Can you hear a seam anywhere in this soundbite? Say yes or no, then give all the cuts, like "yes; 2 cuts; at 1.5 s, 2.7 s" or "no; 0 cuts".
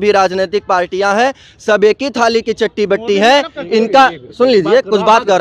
no; 0 cuts